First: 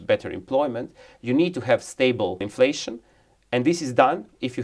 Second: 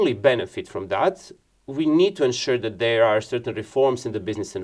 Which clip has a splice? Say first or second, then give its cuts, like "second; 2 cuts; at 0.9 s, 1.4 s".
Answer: first; 1 cut; at 2.5 s